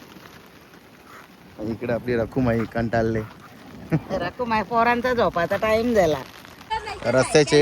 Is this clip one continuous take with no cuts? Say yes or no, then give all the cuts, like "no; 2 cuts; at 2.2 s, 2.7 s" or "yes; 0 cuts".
no; 1 cut; at 6.5 s